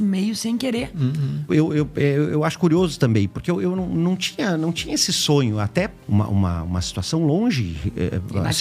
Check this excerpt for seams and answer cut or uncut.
cut